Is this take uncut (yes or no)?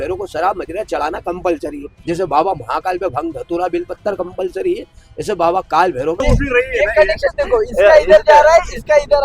no